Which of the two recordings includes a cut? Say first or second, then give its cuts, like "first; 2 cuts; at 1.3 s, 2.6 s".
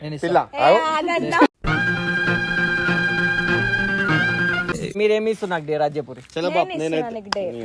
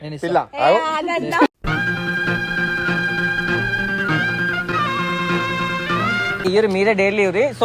first; 1 cut; at 4.7 s